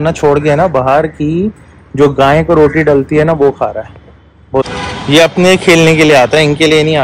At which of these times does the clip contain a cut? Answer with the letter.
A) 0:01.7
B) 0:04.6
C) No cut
B